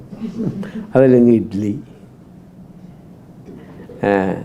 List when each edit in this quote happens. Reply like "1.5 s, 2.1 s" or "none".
none